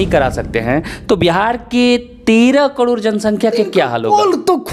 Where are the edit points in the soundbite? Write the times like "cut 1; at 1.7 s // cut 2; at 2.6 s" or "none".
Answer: none